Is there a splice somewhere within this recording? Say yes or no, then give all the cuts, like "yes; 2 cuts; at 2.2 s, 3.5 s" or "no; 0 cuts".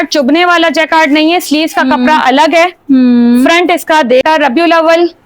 yes; 1 cut; at 4.2 s